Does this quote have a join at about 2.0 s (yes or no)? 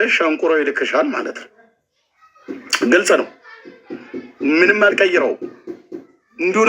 no